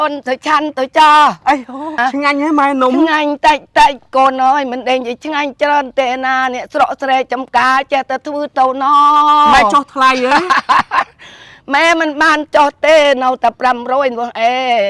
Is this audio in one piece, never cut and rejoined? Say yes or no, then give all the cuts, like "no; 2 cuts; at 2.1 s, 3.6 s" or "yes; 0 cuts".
no; 1 cut; at 2.0 s